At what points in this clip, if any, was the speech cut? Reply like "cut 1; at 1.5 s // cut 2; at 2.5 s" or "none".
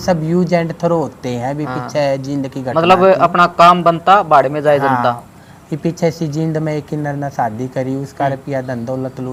none